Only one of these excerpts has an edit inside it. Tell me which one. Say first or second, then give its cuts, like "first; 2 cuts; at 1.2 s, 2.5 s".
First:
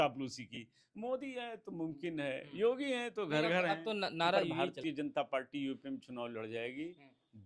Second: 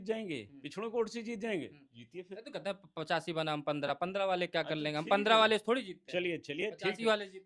first; 1 cut; at 4.7 s